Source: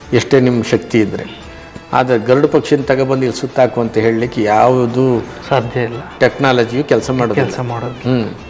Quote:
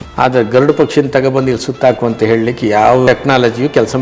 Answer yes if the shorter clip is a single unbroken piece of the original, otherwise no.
no